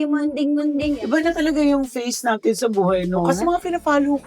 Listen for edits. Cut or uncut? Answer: cut